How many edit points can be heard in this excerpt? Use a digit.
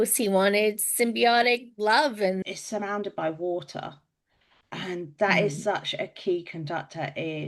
1